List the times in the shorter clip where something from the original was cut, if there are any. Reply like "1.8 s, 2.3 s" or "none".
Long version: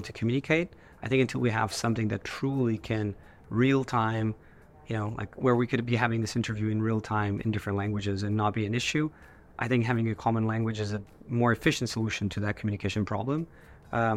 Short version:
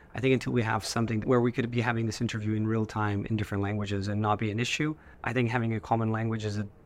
1.2 s, 5.1 s